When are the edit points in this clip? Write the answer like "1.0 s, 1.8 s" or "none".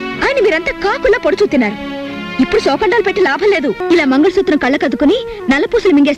3.8 s